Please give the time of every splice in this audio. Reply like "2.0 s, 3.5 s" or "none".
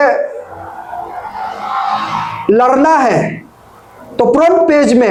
none